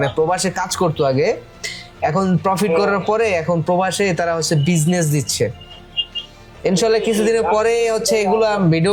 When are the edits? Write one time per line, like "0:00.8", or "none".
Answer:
none